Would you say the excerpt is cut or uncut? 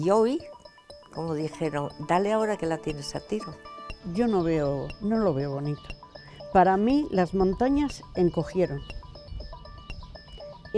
cut